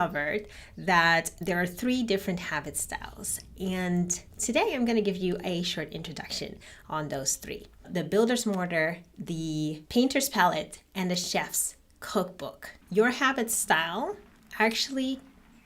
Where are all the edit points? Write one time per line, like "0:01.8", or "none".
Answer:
0:01.4